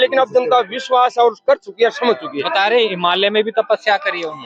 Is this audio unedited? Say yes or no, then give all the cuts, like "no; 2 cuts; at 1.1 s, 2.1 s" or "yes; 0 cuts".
yes; 0 cuts